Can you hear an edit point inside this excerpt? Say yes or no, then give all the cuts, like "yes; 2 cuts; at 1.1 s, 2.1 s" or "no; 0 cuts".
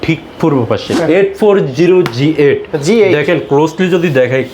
yes; 1 cut; at 0.9 s